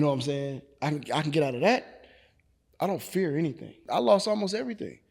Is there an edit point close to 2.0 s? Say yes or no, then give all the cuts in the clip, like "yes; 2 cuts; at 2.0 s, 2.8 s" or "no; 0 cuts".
no; 1 cut; at 3.9 s